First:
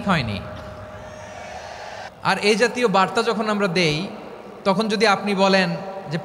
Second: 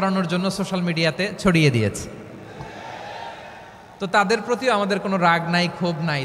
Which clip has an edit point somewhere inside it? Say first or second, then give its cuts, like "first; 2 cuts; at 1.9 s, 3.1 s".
first; 1 cut; at 2.1 s